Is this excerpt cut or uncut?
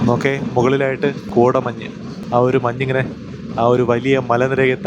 cut